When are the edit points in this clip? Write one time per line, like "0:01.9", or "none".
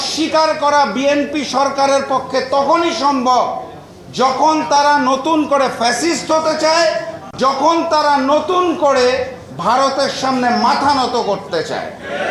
none